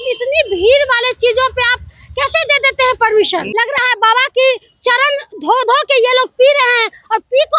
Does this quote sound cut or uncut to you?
cut